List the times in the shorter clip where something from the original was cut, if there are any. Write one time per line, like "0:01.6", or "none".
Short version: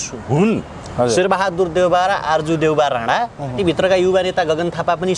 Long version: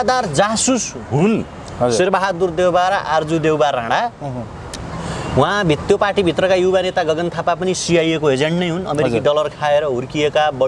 0:03.6